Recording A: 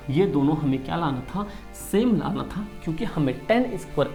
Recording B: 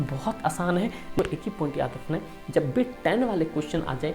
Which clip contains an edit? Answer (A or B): B